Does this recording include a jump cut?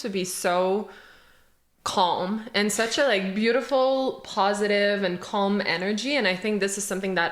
no; 0 cuts

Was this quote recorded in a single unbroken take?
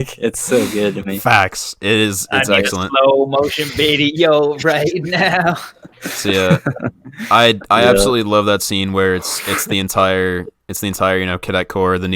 yes; 0 cuts

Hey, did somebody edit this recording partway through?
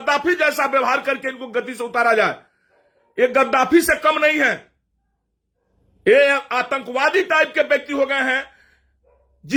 no; 0 cuts

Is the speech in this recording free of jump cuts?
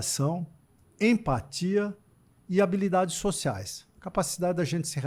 yes; 0 cuts

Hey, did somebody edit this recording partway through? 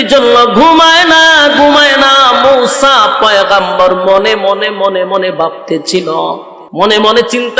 yes; 1 cut; at 6.6 s

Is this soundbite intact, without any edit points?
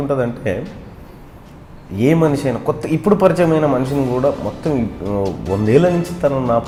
yes; 0 cuts

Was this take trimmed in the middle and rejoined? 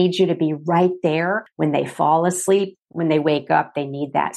yes; 2 cuts; at 1.4 s, 2.8 s

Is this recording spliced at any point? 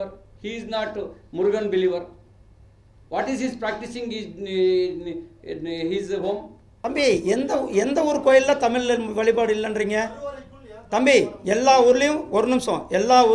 yes; 1 cut; at 6.9 s

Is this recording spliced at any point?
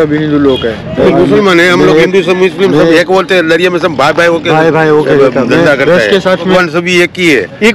yes; 2 cuts; at 1.1 s, 6.5 s

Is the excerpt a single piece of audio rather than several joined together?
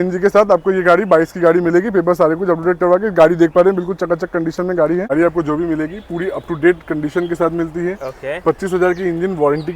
no; 1 cut; at 5.1 s

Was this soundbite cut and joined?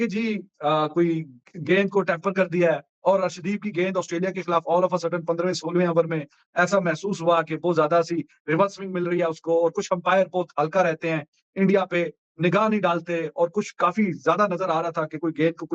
no; 0 cuts

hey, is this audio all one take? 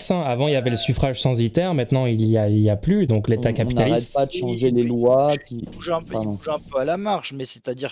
yes; 0 cuts

